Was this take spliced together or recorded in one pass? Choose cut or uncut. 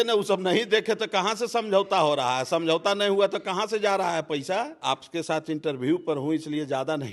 cut